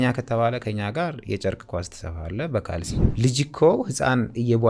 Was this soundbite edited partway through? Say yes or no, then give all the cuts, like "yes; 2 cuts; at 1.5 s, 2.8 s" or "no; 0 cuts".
yes; 1 cut; at 3.0 s